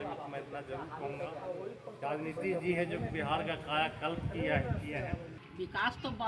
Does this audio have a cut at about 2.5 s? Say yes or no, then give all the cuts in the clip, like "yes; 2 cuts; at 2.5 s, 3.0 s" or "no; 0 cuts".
no; 1 cut; at 5.4 s